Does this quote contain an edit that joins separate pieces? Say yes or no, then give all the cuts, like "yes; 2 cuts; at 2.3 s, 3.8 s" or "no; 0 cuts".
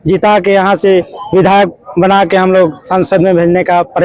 no; 0 cuts